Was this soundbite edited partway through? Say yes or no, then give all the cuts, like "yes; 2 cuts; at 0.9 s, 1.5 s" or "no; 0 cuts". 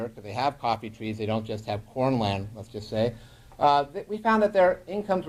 no; 0 cuts